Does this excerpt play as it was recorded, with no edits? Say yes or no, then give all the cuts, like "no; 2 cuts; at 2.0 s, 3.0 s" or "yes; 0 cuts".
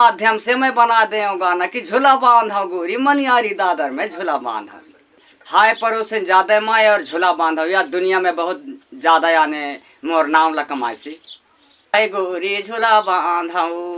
no; 2 cuts; at 5.3 s, 11.9 s